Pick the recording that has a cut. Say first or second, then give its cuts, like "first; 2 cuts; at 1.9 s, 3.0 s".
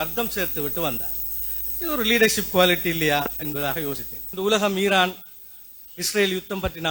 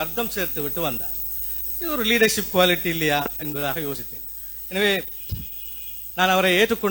first; 1 cut; at 4.2 s